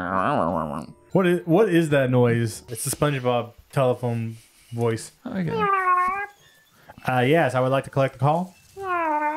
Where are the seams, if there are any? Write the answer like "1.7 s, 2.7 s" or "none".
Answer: 0.9 s, 2.7 s

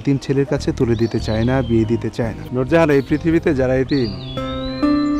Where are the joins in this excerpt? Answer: 2.4 s

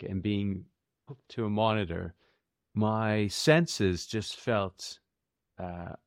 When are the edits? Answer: none

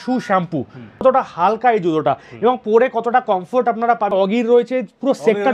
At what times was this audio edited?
1.0 s, 4.1 s

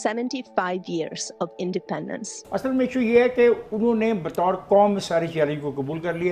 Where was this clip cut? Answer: 2.3 s

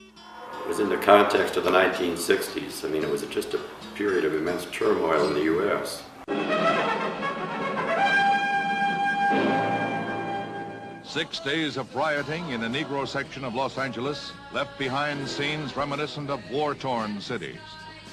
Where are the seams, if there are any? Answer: none

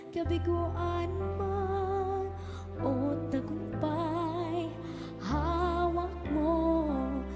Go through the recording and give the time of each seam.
5.0 s

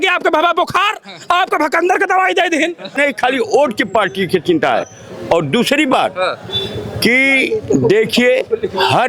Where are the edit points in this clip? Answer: 3.0 s

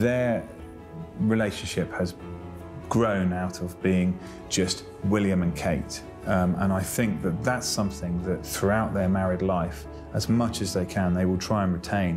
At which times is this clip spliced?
none

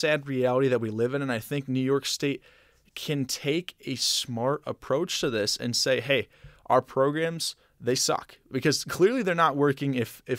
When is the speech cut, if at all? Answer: none

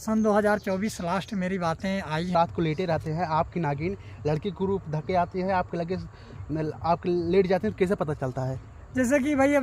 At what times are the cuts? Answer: 2.3 s

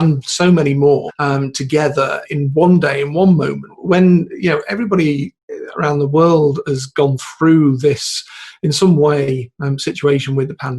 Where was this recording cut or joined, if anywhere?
1.1 s, 2.2 s, 3.7 s

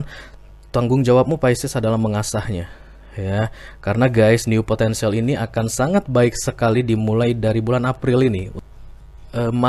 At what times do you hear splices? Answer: 8.5 s

